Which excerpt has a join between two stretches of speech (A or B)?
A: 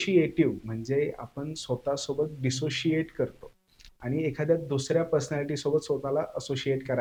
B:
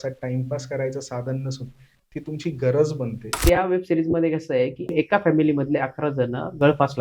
B